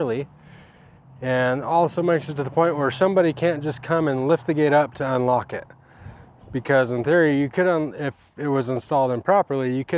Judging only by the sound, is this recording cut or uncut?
uncut